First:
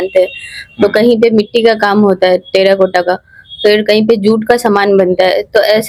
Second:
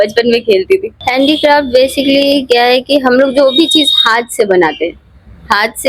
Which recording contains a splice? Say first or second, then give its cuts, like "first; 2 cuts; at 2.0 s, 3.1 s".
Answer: second; 1 cut; at 0.9 s